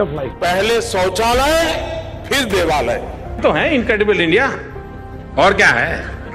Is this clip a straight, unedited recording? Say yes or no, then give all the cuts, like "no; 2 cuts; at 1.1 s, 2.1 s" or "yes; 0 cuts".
no; 1 cut; at 3.4 s